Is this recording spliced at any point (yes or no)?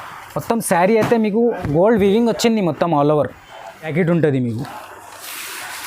yes